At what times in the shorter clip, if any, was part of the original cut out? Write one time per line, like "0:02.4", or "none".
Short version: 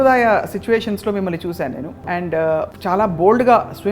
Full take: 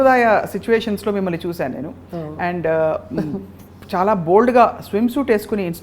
0:01.9
0:02.7